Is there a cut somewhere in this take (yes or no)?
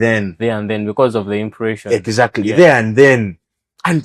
no